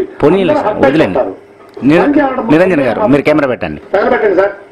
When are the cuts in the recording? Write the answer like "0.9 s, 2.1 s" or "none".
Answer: 3.7 s